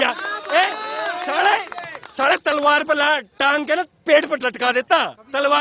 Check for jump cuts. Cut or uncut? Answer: uncut